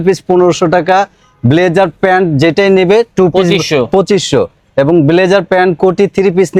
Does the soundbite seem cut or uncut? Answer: uncut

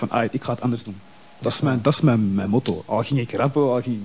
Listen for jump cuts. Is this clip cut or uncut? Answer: uncut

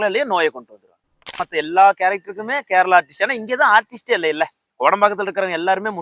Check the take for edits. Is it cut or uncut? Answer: cut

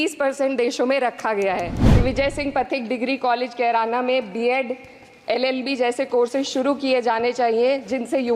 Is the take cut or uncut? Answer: cut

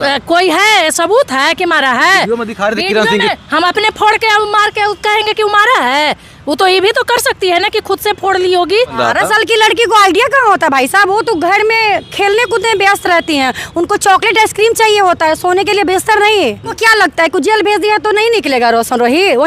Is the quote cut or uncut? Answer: cut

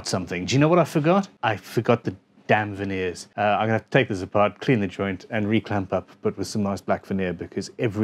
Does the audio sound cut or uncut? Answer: cut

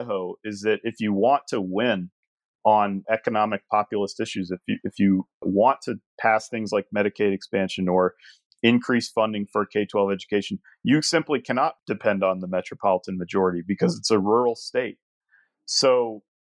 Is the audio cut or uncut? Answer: cut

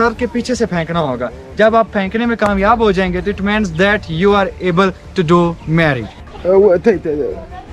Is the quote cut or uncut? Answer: uncut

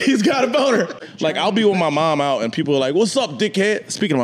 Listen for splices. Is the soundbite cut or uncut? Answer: cut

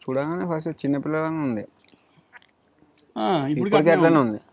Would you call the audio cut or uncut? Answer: uncut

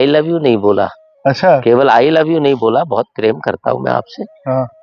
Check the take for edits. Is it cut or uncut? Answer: cut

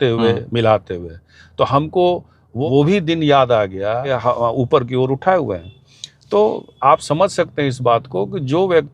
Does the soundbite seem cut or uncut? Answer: cut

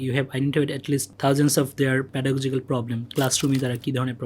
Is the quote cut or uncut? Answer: cut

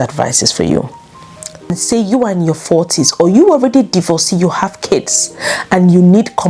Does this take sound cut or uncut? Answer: cut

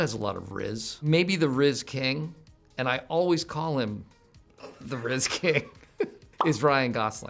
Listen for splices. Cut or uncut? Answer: cut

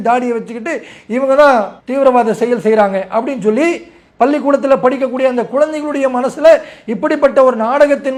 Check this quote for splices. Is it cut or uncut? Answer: uncut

